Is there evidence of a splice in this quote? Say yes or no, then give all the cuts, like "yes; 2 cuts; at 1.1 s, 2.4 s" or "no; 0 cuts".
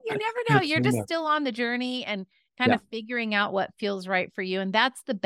no; 0 cuts